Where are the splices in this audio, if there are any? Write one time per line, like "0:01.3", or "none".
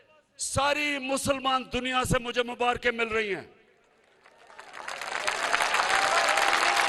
none